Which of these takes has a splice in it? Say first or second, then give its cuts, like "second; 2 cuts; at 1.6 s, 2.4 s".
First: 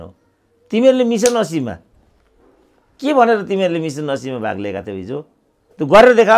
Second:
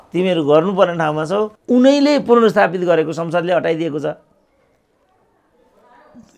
second; 1 cut; at 1.6 s